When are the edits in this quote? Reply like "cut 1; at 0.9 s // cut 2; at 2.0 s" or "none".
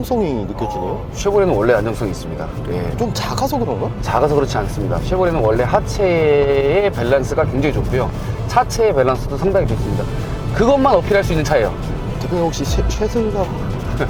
none